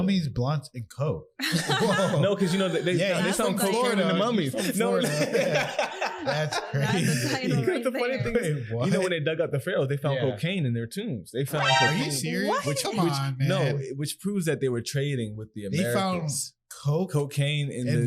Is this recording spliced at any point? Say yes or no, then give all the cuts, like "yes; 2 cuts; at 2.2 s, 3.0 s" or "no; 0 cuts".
no; 0 cuts